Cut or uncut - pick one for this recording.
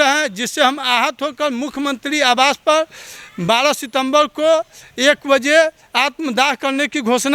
uncut